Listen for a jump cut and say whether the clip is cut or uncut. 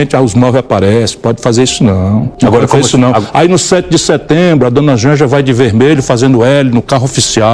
cut